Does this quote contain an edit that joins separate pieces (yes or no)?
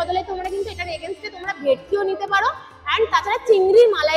no